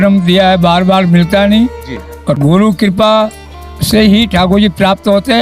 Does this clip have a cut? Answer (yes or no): yes